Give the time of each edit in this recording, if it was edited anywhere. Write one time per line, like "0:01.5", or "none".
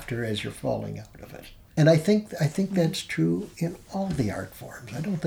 0:01.7